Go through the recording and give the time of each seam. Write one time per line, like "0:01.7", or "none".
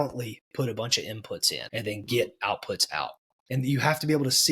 0:01.6